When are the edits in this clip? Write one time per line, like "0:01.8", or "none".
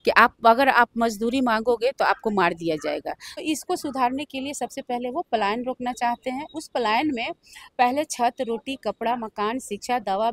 0:03.4